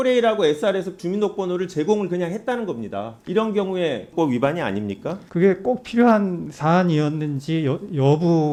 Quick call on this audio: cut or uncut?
uncut